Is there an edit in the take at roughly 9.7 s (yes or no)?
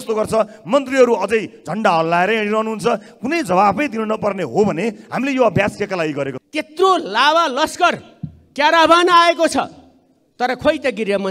no